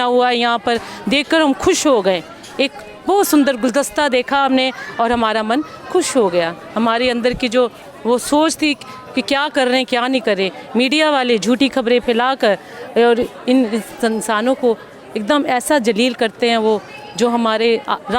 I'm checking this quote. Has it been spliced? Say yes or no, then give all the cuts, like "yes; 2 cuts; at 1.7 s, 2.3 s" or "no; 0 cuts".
no; 0 cuts